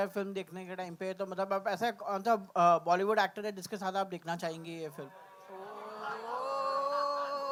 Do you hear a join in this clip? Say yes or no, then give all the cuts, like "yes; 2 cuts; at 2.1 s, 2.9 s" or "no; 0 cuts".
no; 0 cuts